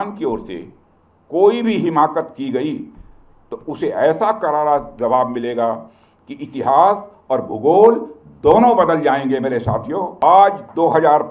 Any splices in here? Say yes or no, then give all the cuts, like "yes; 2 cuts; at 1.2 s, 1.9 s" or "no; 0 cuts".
yes; 1 cut; at 10.1 s